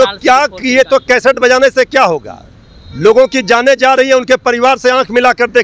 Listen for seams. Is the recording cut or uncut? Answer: uncut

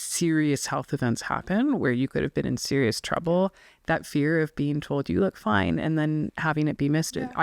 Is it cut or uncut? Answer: uncut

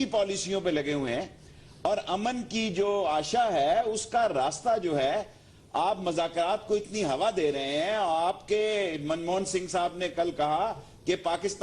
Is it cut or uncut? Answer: cut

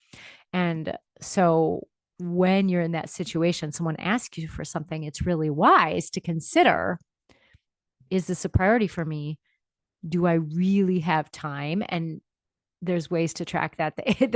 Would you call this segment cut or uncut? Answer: uncut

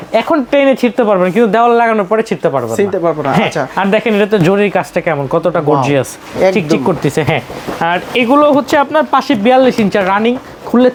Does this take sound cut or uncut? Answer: uncut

